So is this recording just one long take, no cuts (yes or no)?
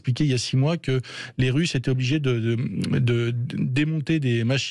yes